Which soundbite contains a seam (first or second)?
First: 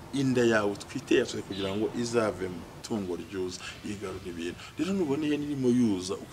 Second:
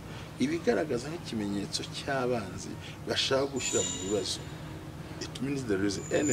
first